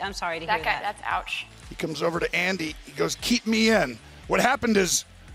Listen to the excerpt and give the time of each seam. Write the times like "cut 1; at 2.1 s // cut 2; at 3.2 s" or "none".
cut 1; at 1.6 s